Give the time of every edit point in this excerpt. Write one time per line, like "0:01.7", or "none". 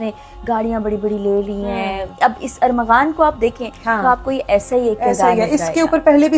0:02.1